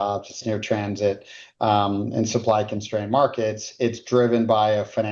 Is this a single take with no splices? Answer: yes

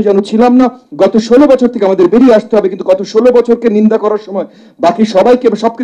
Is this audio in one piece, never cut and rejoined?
yes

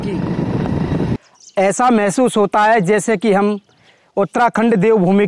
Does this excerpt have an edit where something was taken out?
yes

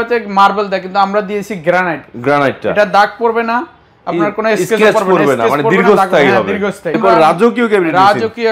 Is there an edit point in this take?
yes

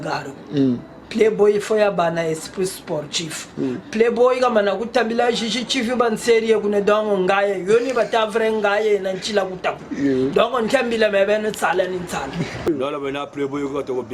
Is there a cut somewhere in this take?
yes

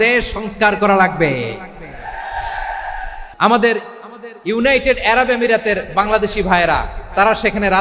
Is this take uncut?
no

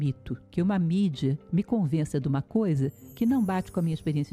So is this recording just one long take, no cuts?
yes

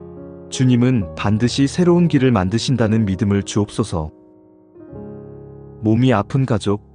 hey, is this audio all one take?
yes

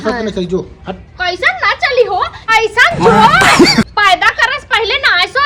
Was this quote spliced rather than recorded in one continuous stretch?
no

